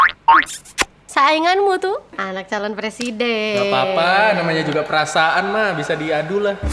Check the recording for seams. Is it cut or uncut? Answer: cut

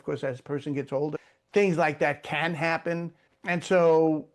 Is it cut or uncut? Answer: cut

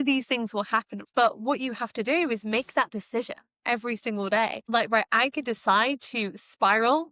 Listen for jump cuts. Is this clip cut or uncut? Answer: cut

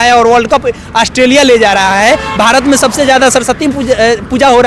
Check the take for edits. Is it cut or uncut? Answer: uncut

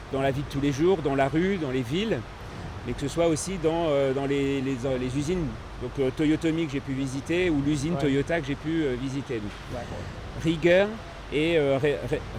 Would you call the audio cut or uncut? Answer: uncut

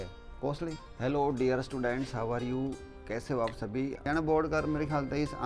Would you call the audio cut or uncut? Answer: cut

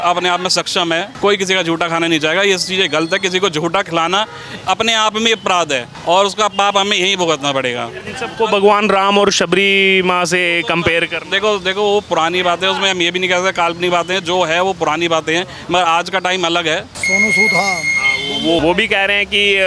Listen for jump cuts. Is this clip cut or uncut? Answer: cut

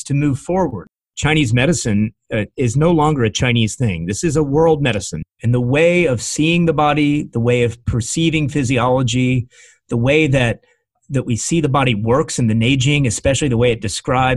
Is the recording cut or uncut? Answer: cut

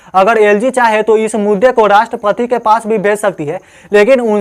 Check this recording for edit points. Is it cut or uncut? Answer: uncut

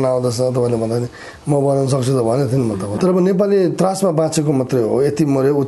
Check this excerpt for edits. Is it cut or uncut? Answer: cut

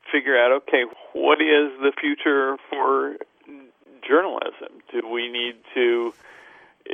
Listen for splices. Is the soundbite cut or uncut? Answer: cut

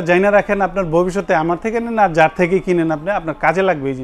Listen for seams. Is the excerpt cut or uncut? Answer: uncut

